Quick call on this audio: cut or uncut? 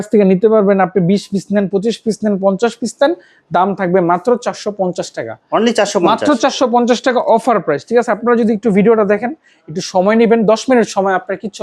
uncut